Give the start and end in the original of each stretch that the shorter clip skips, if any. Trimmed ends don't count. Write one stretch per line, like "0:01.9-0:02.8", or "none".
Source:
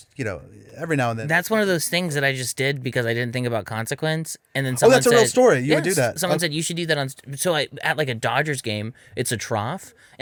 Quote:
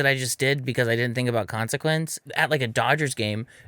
0:04.4-0:07.7